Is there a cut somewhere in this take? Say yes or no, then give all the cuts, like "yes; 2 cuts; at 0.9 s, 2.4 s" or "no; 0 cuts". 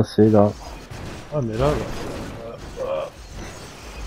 no; 0 cuts